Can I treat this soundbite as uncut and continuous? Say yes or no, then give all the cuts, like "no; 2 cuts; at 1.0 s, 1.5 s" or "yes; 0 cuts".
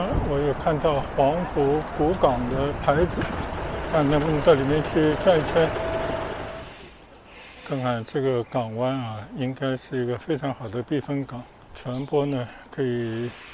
no; 1 cut; at 6.4 s